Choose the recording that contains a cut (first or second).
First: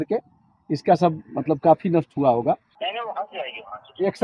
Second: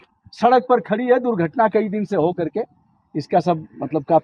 first